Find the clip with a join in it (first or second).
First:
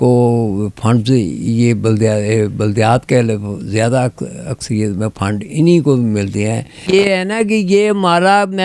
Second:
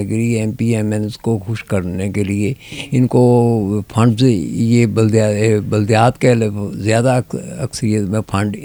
first